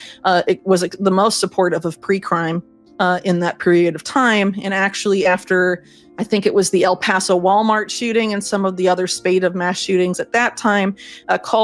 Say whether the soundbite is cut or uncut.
cut